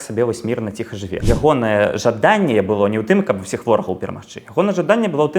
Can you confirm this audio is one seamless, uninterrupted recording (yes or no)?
no